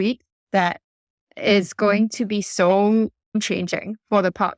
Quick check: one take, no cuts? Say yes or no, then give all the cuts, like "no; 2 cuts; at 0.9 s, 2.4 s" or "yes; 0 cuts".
no; 1 cut; at 3.4 s